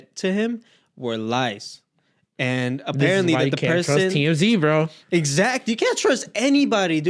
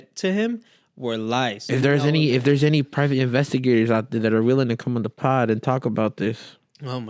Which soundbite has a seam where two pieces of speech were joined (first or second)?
second